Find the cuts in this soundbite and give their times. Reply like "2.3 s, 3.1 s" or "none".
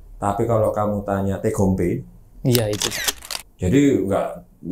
2.9 s